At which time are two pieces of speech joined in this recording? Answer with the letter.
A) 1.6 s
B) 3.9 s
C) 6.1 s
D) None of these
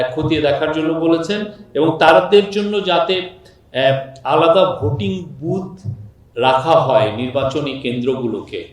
D